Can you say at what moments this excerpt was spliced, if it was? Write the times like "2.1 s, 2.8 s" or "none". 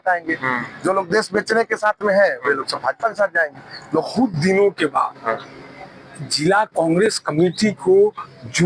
4.1 s